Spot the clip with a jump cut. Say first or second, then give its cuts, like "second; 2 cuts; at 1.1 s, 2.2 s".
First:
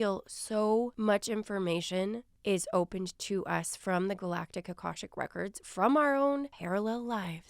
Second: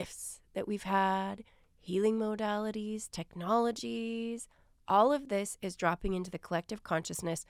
first; 3 cuts; at 0.9 s, 2.3 s, 6.6 s